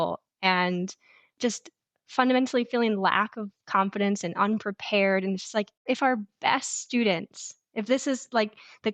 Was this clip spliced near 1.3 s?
yes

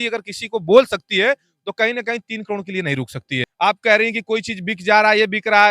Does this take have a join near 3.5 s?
yes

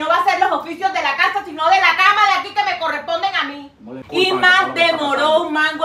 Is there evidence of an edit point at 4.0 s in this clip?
yes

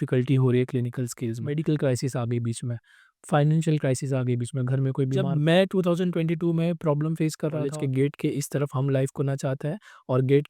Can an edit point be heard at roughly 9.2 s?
no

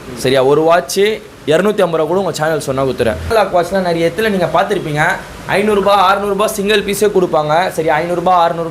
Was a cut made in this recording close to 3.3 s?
yes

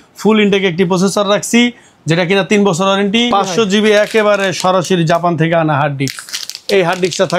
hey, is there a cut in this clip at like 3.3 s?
yes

